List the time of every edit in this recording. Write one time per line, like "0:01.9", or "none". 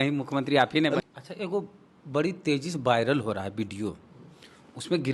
0:01.0